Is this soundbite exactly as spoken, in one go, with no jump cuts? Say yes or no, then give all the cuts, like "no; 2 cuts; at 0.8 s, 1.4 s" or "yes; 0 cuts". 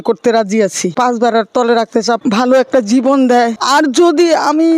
no; 3 cuts; at 0.9 s, 2.2 s, 3.6 s